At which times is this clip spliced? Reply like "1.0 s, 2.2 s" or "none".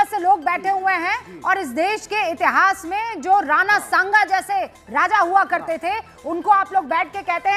none